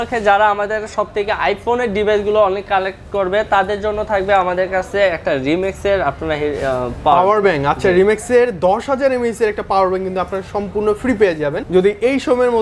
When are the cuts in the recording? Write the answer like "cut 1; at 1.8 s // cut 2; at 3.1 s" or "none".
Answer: cut 1; at 11.6 s

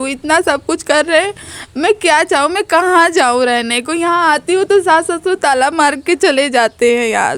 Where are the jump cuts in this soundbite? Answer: none

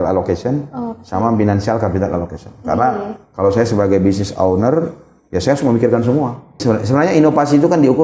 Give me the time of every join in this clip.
cut 1; at 6.6 s

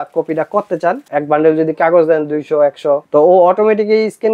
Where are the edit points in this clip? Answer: cut 1; at 1.1 s // cut 2; at 3.0 s

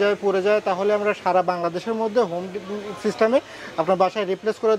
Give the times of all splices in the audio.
none

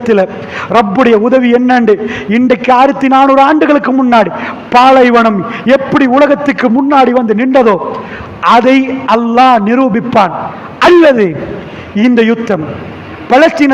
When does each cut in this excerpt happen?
cut 1; at 3.8 s

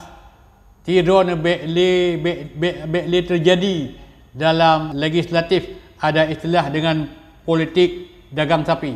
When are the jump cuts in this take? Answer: cut 1; at 4.9 s

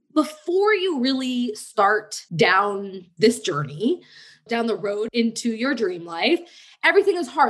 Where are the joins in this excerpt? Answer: cut 1; at 2.6 s // cut 2; at 5.1 s

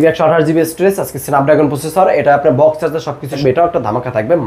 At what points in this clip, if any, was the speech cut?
cut 1; at 3.4 s

